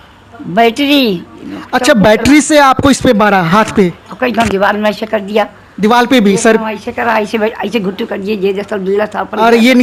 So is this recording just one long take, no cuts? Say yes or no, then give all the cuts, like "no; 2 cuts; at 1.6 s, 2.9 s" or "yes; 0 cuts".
yes; 0 cuts